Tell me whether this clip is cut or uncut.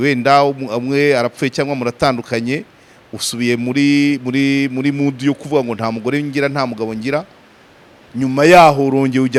uncut